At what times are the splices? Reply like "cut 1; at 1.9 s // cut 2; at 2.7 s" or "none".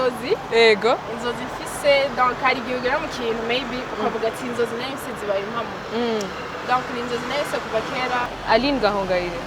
cut 1; at 8.3 s